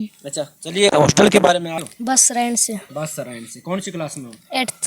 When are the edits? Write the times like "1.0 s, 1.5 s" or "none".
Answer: 1.9 s